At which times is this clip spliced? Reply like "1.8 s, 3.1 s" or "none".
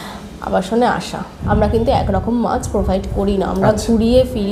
1.3 s